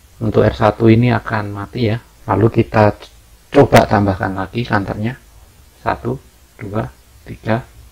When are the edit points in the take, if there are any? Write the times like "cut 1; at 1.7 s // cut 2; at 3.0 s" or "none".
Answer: cut 1; at 2.1 s